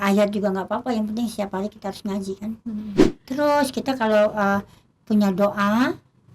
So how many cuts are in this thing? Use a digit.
1